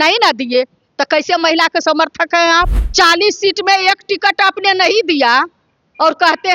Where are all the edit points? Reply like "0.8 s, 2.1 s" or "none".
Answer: 2.8 s